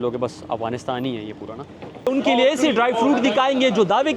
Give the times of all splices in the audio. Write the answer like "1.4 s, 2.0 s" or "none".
2.1 s